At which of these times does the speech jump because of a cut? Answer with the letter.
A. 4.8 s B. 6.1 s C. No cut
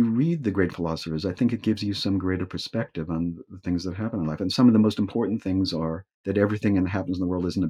B